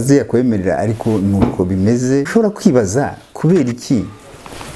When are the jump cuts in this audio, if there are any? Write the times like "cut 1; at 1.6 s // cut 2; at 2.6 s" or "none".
cut 1; at 2.3 s